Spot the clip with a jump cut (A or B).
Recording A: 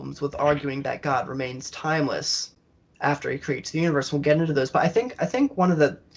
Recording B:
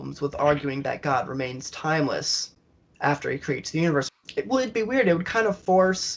B